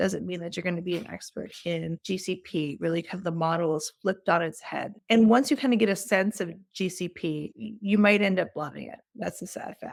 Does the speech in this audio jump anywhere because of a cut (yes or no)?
no